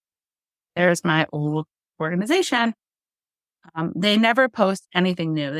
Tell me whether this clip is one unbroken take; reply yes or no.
yes